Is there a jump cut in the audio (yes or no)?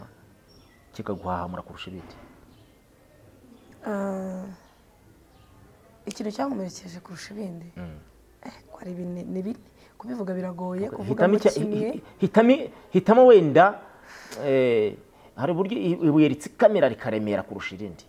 no